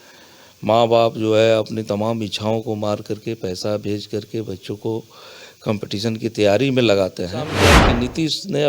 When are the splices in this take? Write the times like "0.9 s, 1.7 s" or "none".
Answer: 7.7 s